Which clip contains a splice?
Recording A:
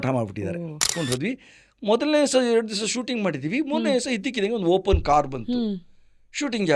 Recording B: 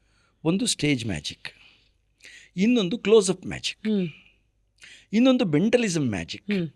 A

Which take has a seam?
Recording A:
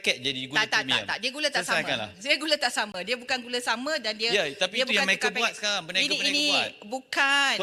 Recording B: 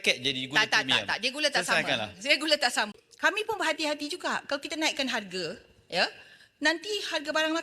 B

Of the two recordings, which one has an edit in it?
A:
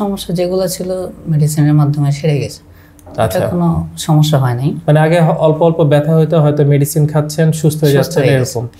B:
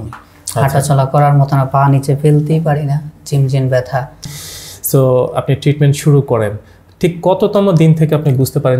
B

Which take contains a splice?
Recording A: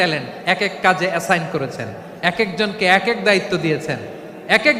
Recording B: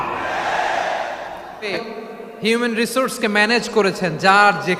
B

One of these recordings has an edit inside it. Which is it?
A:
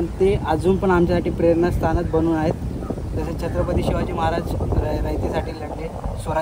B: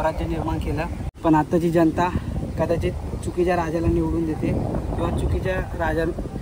B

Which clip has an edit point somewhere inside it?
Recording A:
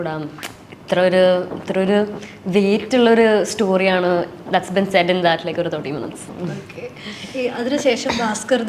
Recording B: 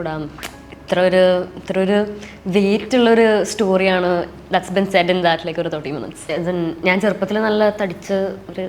B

